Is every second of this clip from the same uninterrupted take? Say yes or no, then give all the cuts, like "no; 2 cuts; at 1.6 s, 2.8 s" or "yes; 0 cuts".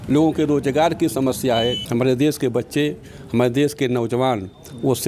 no; 1 cut; at 1.8 s